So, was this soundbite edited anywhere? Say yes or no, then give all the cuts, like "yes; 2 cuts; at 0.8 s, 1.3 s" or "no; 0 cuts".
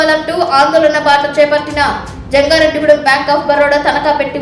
no; 0 cuts